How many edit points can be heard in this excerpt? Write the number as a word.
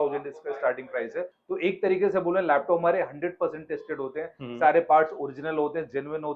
one